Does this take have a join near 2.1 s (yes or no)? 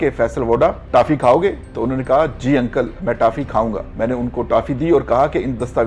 no